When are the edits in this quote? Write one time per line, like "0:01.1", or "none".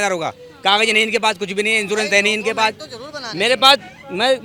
none